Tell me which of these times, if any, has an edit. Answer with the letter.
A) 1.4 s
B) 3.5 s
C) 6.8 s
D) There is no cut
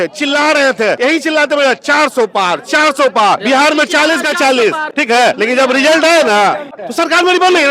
C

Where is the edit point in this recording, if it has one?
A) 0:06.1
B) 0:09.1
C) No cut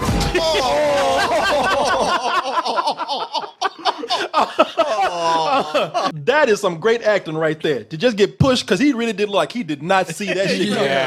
A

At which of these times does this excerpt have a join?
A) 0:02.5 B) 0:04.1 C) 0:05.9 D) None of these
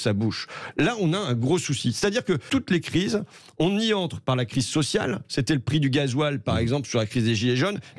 A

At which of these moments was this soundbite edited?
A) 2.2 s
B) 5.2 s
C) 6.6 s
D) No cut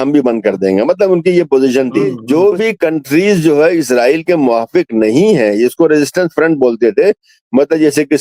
A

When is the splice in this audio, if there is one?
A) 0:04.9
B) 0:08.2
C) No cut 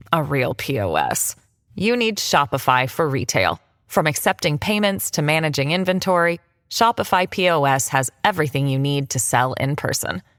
C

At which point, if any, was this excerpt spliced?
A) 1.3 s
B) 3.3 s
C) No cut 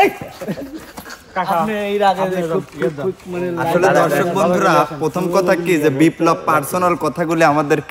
C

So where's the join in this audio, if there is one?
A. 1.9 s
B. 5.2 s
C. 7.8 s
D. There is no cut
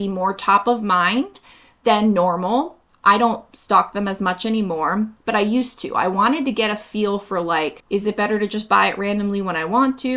C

